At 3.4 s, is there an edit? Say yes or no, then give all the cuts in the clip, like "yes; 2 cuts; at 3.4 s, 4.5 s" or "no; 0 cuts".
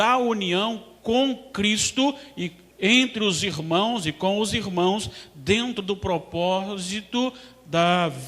yes; 1 cut; at 3.4 s